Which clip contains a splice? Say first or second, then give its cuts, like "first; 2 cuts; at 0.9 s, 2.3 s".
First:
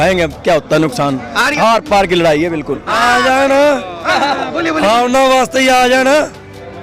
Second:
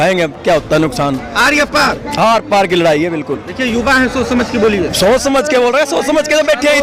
first; 2 cuts; at 1.5 s, 2.9 s